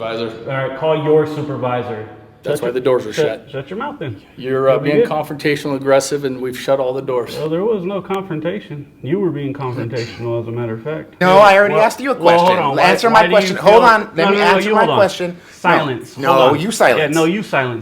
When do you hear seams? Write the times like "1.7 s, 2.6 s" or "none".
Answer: 2.3 s, 11.2 s